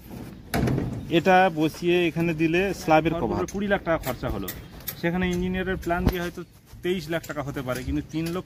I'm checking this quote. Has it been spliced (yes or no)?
yes